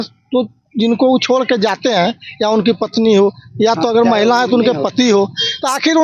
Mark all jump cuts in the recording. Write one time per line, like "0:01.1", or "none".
none